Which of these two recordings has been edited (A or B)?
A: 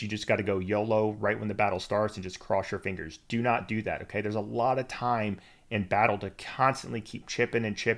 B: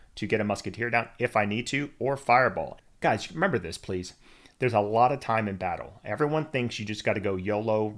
B